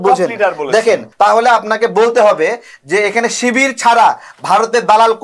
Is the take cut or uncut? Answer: cut